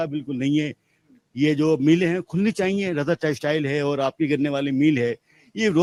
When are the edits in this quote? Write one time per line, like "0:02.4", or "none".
none